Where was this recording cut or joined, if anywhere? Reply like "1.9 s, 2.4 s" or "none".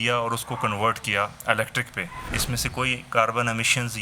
2.3 s